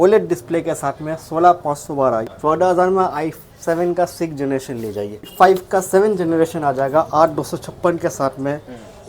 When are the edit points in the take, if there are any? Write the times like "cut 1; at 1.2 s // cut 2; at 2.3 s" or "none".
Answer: cut 1; at 2.3 s // cut 2; at 5.3 s